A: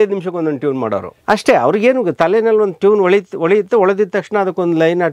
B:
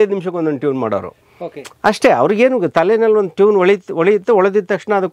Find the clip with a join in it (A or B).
A